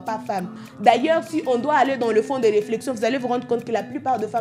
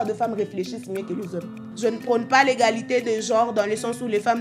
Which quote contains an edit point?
second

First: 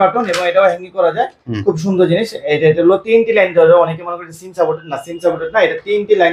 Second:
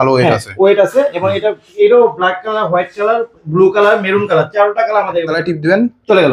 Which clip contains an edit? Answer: second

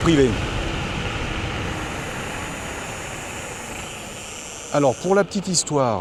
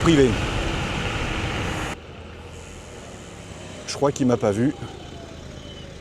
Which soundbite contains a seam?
second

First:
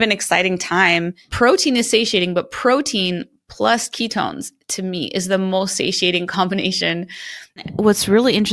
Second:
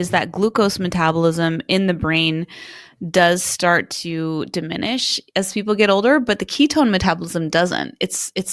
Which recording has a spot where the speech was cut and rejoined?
first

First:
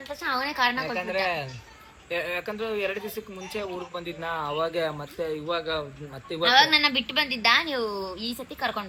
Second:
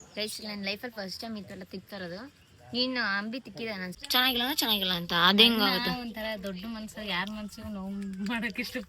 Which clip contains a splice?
second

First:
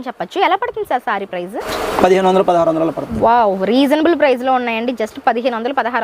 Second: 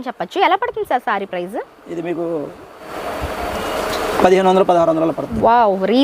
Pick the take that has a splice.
first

